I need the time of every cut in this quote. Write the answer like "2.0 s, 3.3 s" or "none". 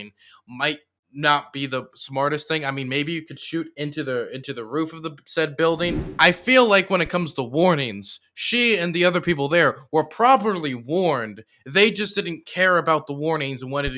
6.0 s